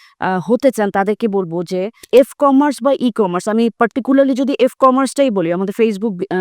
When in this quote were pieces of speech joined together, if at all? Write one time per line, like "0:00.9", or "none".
0:02.1